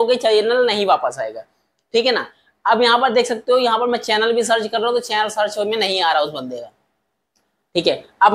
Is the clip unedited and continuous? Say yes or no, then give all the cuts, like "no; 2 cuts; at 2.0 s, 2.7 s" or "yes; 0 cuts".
yes; 0 cuts